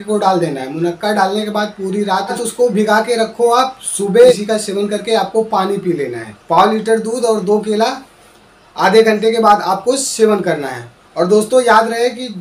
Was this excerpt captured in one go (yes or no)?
no